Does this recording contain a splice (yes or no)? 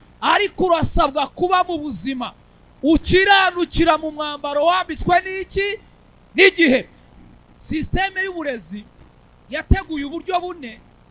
yes